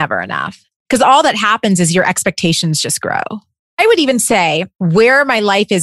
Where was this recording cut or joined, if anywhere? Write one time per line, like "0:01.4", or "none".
0:04.7